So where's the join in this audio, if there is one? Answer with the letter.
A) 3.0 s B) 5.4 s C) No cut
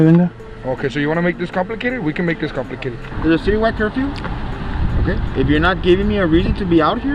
A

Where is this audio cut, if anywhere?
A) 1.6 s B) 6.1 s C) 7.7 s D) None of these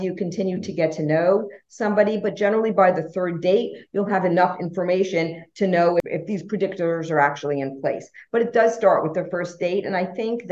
B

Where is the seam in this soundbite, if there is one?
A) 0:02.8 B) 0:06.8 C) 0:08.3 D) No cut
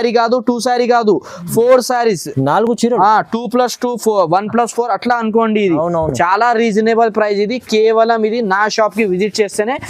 D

